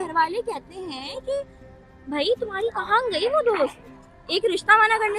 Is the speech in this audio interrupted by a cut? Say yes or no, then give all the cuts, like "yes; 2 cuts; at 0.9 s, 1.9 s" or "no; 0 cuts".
no; 0 cuts